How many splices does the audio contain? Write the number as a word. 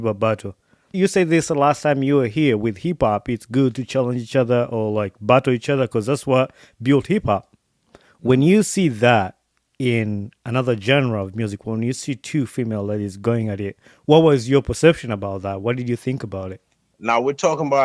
one